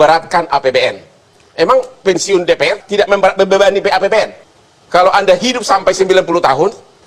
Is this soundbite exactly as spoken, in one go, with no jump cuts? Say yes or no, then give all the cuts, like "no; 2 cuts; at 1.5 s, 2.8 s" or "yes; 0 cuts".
no; 1 cut; at 4.4 s